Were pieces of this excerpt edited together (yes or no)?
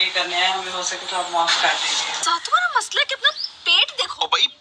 yes